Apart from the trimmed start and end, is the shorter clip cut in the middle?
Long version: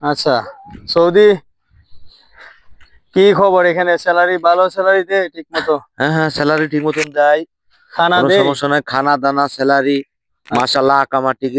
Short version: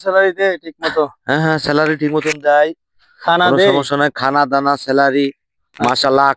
no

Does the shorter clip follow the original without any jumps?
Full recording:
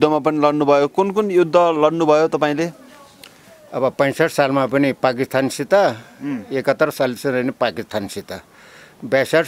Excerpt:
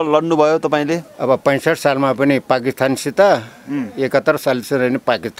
no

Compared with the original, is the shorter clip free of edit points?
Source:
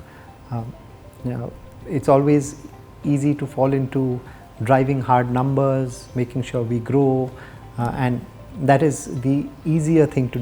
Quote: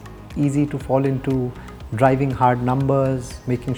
yes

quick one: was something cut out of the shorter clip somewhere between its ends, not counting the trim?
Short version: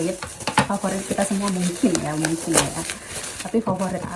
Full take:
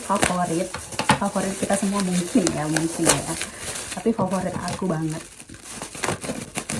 no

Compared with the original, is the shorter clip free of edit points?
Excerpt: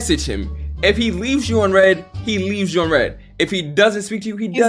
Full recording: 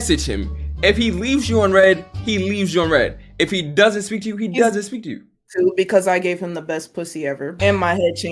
yes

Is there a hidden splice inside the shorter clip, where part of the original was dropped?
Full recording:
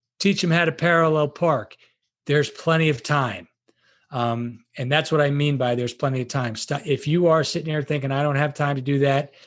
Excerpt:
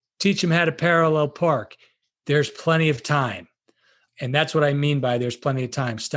yes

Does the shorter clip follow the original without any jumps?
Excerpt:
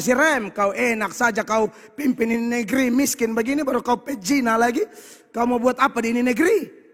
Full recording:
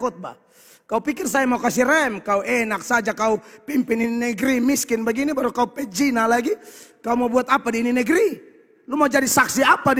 yes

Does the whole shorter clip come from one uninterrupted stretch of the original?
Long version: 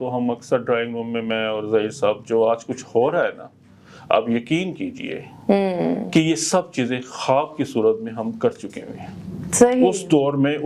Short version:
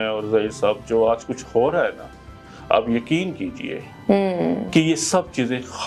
yes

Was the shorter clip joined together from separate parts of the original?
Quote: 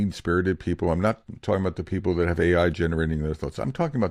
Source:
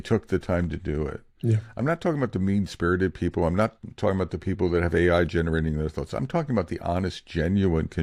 no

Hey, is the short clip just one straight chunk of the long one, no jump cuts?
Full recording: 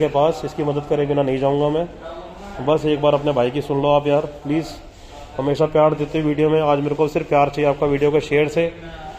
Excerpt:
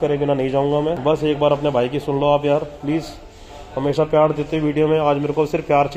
no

